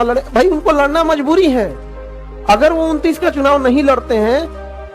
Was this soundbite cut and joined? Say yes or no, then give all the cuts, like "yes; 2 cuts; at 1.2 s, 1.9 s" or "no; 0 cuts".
no; 0 cuts